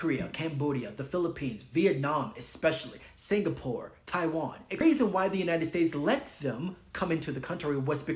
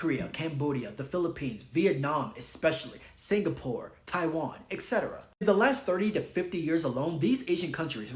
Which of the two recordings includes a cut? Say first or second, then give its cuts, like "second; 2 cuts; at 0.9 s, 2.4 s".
first; 1 cut; at 4.8 s